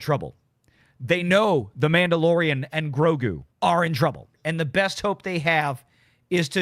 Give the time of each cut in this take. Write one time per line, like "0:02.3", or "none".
0:03.4
0:04.4